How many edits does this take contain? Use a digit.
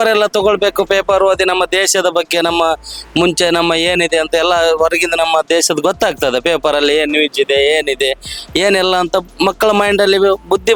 0